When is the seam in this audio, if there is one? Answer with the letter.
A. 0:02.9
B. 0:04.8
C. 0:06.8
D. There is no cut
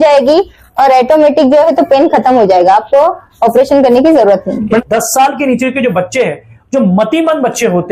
B